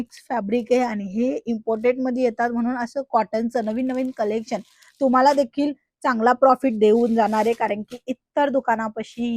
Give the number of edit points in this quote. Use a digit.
0